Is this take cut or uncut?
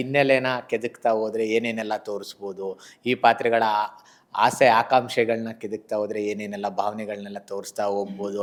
uncut